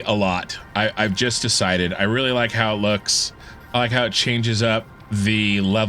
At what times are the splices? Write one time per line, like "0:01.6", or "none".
0:05.0

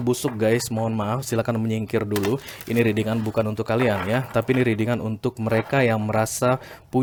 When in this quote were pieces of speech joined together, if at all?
none

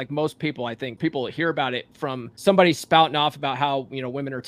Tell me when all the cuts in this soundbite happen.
0:01.0
0:02.3

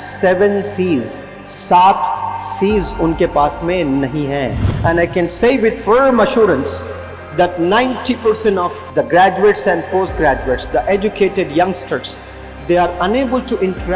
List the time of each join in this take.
0:04.7
0:08.8

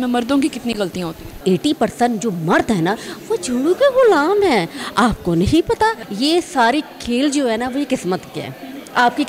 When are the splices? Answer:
0:01.4
0:06.0

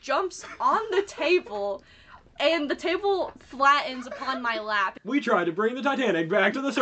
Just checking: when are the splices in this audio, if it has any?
0:05.0

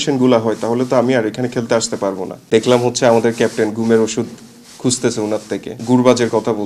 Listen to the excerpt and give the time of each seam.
0:02.3
0:05.8

